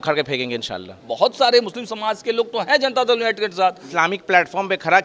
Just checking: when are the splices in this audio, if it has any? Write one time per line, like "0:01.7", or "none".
0:01.0
0:03.8